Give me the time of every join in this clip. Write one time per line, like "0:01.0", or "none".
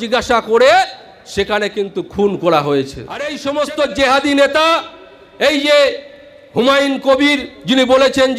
0:03.4